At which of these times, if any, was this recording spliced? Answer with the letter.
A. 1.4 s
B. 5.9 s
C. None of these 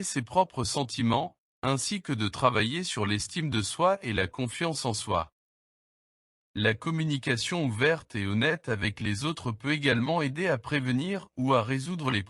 A